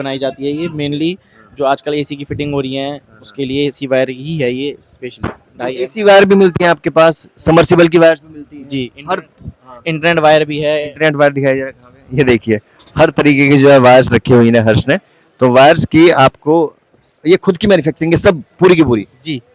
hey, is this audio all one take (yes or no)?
yes